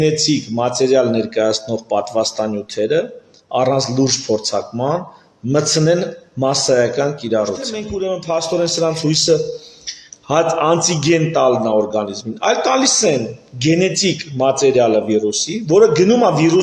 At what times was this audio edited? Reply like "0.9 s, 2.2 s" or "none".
7.8 s